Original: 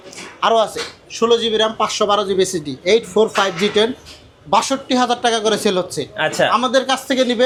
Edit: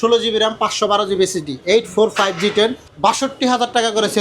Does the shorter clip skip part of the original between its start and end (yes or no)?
yes